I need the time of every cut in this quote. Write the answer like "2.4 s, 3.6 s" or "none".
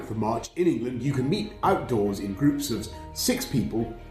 none

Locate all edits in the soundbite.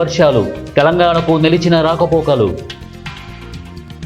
2.9 s

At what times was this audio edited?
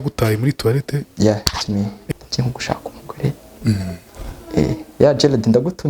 1.0 s, 2.0 s

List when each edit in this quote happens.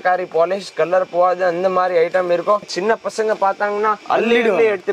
2.7 s

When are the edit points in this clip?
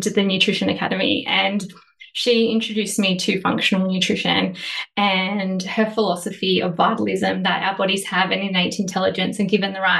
none

